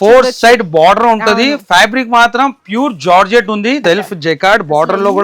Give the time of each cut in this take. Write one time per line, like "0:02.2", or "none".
0:03.8